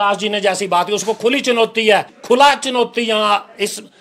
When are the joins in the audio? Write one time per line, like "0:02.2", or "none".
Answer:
0:02.1